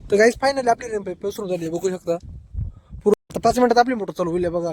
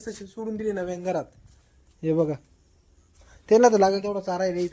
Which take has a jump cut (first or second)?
first